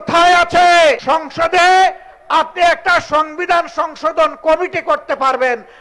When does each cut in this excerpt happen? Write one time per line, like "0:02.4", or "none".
0:01.0